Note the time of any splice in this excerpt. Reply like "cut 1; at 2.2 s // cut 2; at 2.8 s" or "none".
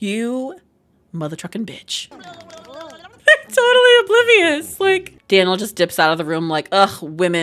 cut 1; at 2.1 s // cut 2; at 5.1 s